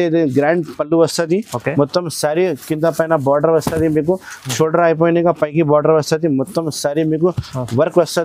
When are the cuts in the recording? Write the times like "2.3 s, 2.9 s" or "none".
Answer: none